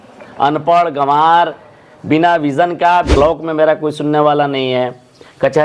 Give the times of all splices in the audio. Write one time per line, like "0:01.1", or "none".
0:03.2